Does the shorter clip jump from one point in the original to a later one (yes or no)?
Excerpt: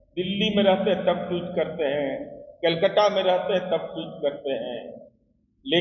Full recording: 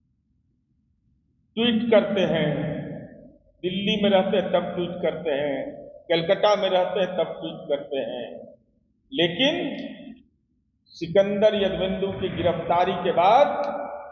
no